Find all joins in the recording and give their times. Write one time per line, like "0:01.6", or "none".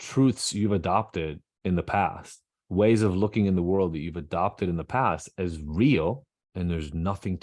0:06.4